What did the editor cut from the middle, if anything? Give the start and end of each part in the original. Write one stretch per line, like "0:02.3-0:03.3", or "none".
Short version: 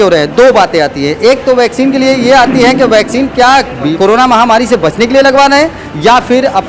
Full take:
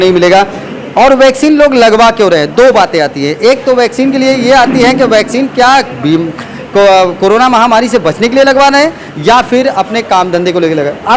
0:06.1-0:07.2